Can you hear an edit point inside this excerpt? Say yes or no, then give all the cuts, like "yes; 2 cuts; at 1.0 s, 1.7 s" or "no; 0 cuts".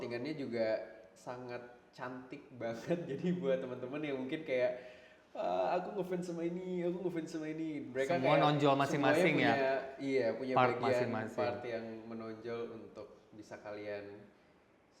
no; 0 cuts